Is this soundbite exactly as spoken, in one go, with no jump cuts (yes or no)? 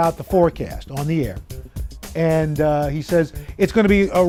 yes